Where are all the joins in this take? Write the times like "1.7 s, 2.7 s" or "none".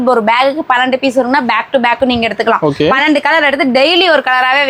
none